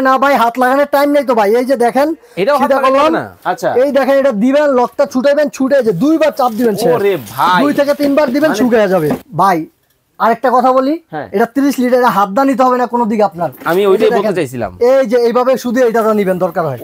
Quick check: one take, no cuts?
no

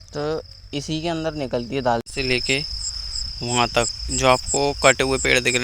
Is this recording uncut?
no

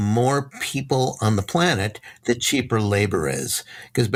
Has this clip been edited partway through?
no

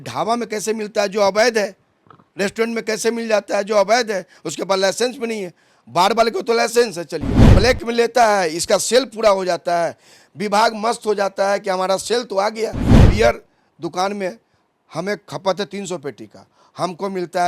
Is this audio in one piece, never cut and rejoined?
no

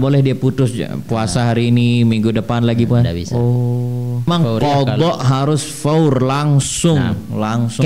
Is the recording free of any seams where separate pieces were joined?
no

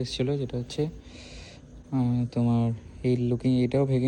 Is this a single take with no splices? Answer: yes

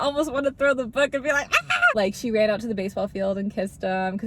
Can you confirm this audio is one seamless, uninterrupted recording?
no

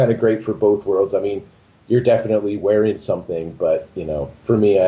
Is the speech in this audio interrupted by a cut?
no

